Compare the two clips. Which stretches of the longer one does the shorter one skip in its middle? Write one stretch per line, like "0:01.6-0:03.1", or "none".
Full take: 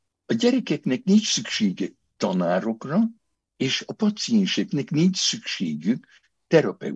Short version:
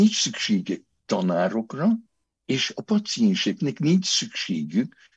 none